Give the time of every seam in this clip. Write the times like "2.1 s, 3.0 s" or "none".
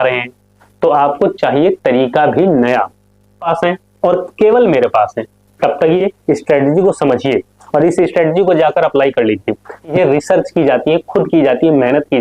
3.5 s, 6.0 s, 9.9 s